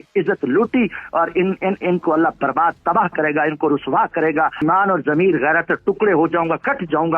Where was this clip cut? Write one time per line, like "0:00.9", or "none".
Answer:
0:04.6